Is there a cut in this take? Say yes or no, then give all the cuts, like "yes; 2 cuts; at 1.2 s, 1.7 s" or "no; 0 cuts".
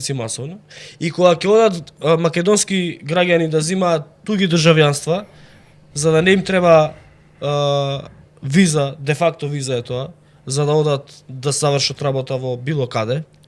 no; 0 cuts